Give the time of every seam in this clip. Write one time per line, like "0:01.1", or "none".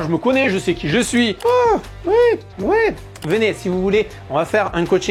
0:01.3